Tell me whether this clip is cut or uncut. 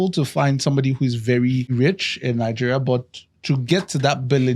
cut